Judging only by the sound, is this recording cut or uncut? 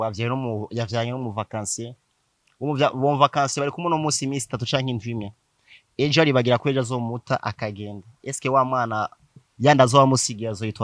uncut